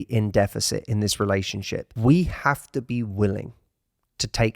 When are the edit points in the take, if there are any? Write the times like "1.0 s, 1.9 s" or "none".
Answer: 1.8 s

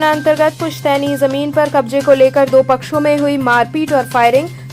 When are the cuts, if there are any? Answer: none

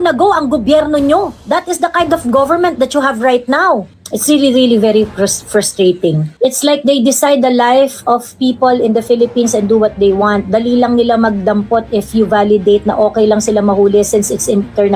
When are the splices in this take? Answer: none

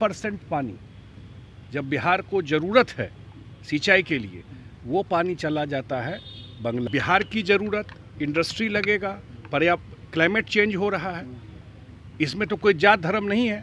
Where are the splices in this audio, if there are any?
6.9 s

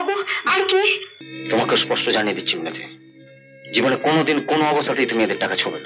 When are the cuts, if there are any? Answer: 1.1 s

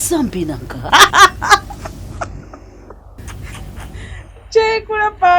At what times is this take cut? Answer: 1.0 s, 3.0 s

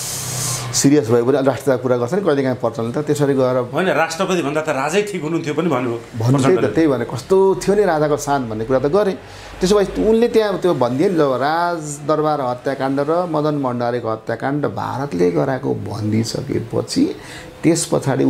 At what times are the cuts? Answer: none

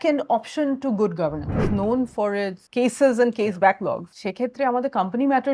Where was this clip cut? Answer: 1.7 s, 2.6 s, 4.2 s

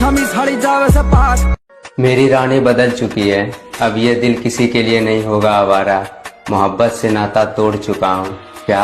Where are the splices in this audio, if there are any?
1.5 s

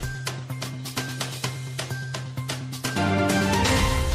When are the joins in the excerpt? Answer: none

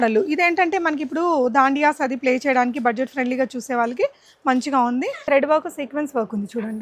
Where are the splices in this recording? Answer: 5.2 s

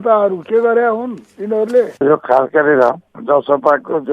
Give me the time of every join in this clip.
1.9 s

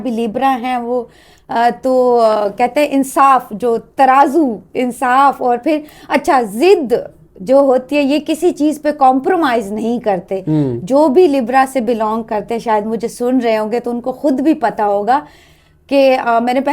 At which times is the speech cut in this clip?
none

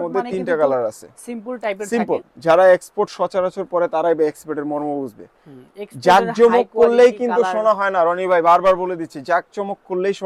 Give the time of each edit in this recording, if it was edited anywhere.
none

